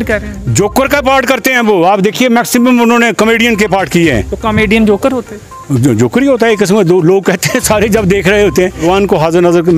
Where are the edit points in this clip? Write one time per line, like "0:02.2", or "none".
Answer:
0:08.8